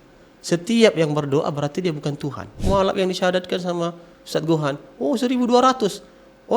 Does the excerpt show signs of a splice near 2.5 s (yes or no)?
yes